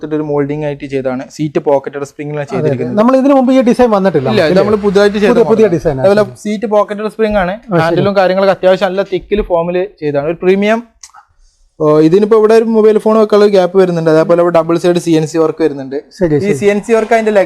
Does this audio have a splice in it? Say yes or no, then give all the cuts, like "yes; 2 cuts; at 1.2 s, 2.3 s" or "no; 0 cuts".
yes; 1 cut; at 11.2 s